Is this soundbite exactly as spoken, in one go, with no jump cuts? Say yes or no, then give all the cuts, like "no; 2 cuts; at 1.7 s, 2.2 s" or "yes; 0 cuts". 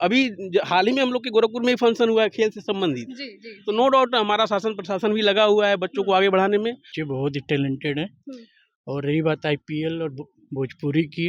no; 1 cut; at 6.9 s